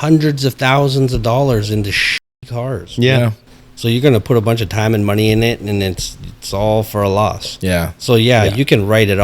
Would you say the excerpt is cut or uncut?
cut